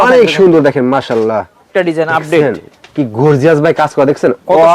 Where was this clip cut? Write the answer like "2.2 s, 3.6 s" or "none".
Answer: 1.7 s